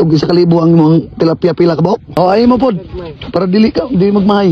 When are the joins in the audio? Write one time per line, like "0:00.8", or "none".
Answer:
0:02.1